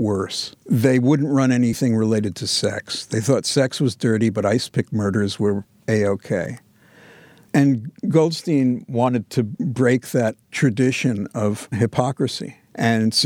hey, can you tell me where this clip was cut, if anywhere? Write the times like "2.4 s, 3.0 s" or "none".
1.8 s, 11.8 s